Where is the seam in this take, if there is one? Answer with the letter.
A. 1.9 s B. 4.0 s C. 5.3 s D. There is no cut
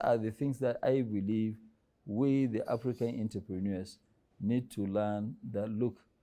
D